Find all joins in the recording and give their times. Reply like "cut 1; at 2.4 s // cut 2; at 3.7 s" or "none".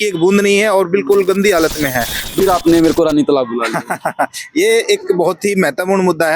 cut 1; at 2.3 s